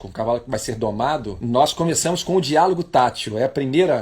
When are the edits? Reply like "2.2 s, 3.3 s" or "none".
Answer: 1.3 s